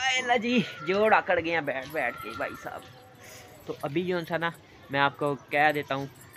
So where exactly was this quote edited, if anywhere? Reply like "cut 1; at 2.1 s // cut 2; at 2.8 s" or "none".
none